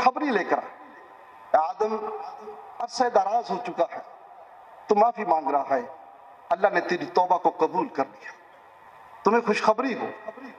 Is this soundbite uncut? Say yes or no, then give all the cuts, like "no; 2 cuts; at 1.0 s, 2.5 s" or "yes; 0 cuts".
yes; 0 cuts